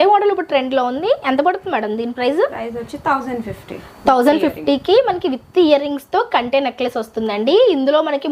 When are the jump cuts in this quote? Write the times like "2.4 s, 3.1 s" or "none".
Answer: none